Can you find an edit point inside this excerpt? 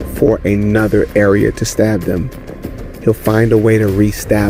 no; 0 cuts

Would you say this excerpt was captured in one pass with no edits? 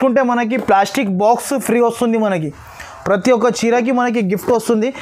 yes; 0 cuts

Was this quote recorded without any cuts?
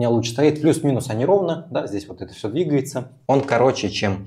no; 1 cut; at 3.2 s

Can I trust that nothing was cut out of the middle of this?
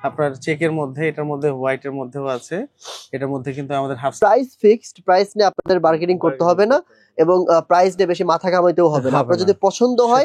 no; 1 cut; at 4.2 s

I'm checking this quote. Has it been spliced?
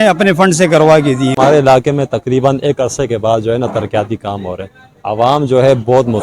yes; 1 cut; at 1.3 s

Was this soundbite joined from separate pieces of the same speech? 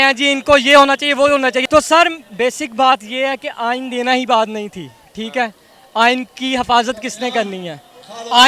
yes; 1 cut; at 1.7 s

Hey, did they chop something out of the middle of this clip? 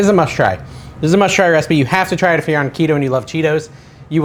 no; 0 cuts

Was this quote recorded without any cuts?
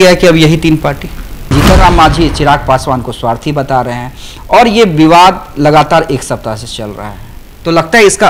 no; 1 cut; at 1.5 s

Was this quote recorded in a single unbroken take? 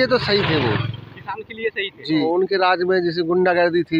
no; 1 cut; at 2.2 s

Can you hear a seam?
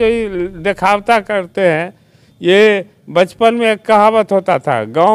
no; 0 cuts

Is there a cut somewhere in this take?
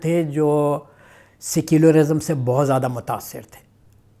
no; 0 cuts

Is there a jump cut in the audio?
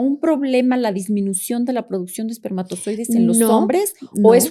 no; 0 cuts

